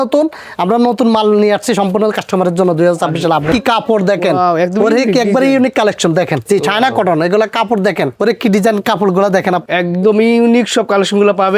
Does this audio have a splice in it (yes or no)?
yes